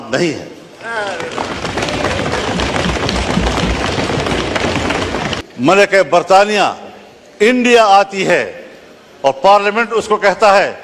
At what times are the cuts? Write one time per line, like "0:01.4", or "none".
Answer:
0:05.2